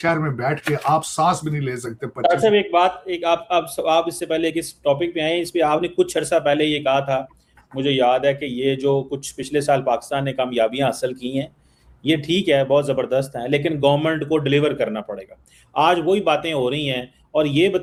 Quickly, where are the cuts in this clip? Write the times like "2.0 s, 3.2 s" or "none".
none